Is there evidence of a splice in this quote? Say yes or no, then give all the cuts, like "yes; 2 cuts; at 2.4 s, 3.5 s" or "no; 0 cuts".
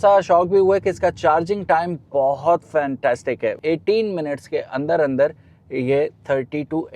yes; 1 cut; at 3.6 s